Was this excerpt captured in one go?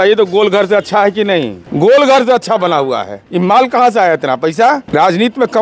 no; 3 cuts; at 1.6 s, 3.2 s, 4.8 s

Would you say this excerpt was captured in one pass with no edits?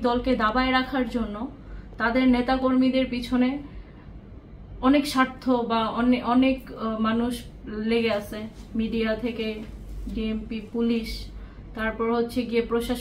yes; 0 cuts

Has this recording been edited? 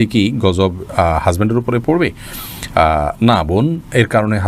no; 0 cuts

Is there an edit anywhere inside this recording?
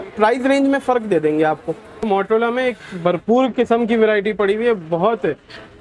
yes; 1 cut; at 2.1 s

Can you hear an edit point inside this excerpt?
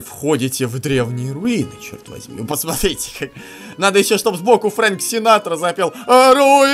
no; 0 cuts

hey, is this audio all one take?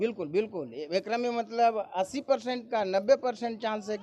yes; 0 cuts

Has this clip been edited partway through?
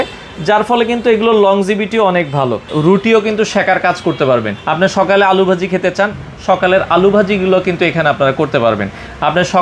yes; 2 cuts; at 2.7 s, 4.6 s

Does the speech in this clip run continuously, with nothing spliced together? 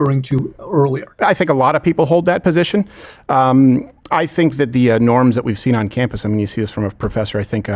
no; 1 cut; at 1.2 s

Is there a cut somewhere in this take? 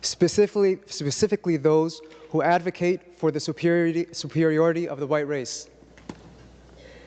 no; 0 cuts

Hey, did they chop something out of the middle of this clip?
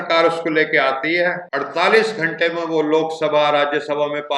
yes; 1 cut; at 1.5 s

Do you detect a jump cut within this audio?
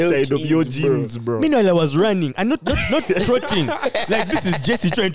no; 0 cuts

